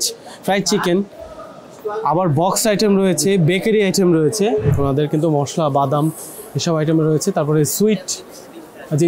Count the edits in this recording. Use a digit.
1